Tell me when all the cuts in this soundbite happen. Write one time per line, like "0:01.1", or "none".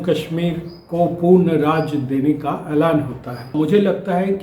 0:03.5